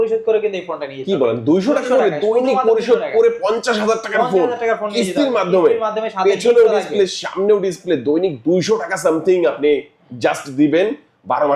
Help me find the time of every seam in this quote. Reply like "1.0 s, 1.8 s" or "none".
none